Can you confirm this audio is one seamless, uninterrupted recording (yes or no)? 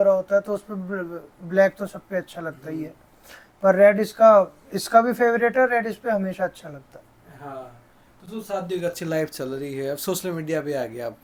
yes